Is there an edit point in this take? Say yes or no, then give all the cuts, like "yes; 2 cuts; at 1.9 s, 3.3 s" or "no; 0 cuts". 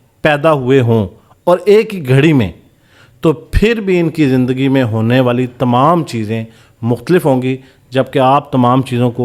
no; 0 cuts